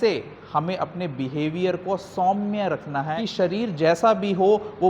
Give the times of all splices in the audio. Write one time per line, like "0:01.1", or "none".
0:03.2